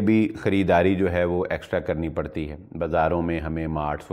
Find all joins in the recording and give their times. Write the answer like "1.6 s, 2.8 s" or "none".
none